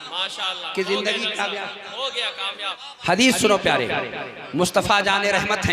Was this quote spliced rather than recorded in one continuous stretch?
yes; 1 cut; at 2.8 s

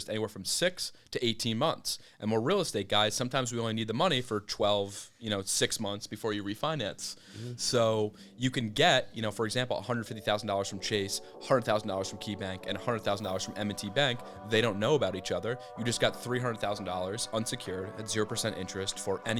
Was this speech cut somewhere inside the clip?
no; 0 cuts

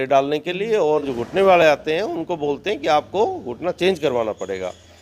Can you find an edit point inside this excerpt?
yes; 1 cut; at 1.1 s

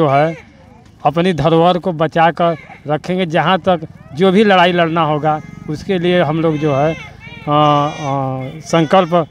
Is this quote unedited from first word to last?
yes; 0 cuts

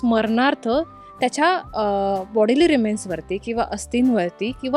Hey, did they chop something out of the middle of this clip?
no; 0 cuts

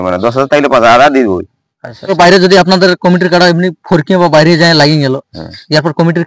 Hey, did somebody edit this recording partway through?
yes; 1 cut; at 2.1 s

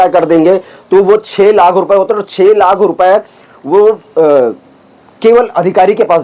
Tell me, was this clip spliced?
no; 0 cuts

